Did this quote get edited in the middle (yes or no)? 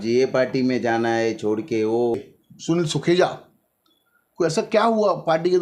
yes